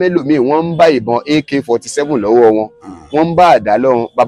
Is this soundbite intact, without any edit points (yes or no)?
yes